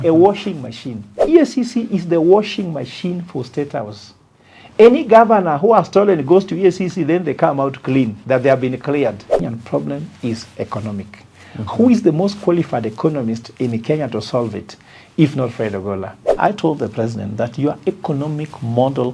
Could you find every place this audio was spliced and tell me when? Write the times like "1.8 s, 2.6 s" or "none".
1.2 s, 9.4 s, 16.3 s